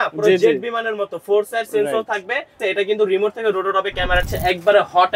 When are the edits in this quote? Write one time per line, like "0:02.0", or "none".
0:02.6
0:04.3